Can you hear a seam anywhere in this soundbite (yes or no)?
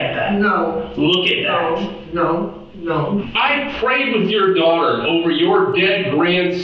yes